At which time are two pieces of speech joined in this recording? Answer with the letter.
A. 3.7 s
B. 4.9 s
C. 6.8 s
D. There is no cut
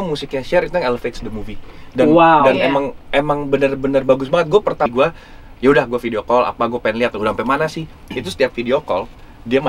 B